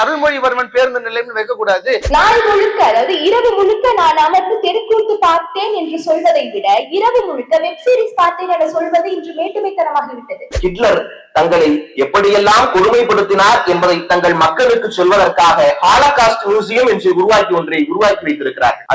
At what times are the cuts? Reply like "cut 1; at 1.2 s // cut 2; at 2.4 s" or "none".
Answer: cut 1; at 2.0 s // cut 2; at 10.6 s